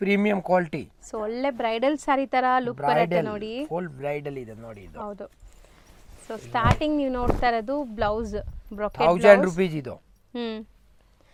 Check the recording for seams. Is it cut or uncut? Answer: uncut